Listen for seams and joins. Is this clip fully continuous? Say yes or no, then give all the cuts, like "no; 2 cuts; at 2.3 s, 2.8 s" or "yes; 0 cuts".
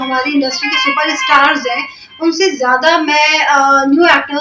yes; 0 cuts